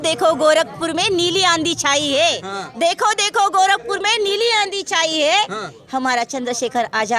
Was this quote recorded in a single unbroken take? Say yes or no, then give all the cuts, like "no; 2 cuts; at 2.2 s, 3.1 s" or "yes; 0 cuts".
yes; 0 cuts